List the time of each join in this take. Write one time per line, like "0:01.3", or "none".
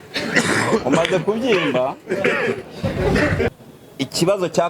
0:03.5